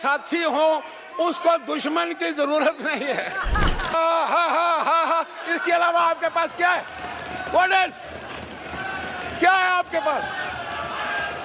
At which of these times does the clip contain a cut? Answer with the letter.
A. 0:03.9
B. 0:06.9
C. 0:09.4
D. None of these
A